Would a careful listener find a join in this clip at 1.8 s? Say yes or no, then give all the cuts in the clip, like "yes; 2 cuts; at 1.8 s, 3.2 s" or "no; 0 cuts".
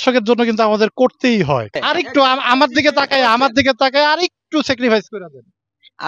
yes; 1 cut; at 1.8 s